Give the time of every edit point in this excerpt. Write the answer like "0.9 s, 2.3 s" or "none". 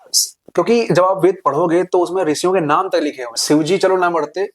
3.3 s